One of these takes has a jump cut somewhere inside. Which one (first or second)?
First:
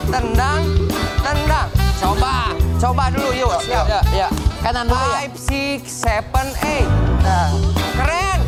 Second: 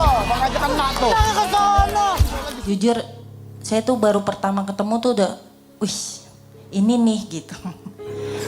second